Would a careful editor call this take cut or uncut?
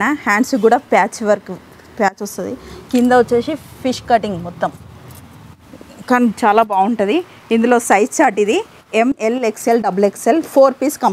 uncut